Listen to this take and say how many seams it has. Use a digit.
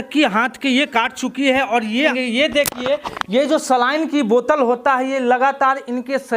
1